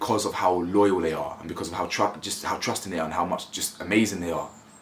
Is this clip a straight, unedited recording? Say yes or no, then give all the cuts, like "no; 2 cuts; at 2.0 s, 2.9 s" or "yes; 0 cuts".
yes; 0 cuts